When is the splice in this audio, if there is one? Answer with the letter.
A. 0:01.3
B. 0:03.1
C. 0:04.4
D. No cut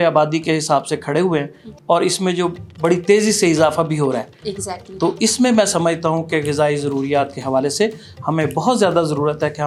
D